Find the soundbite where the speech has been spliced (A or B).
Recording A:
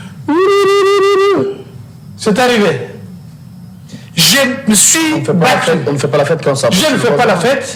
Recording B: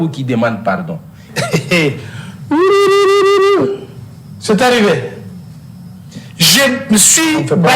B